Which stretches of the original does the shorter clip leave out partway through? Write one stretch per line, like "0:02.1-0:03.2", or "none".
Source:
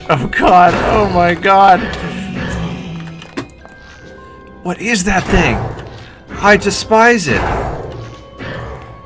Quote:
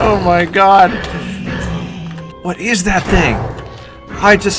0:03.2-0:04.5